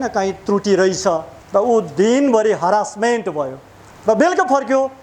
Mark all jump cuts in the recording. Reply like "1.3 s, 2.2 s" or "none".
1.3 s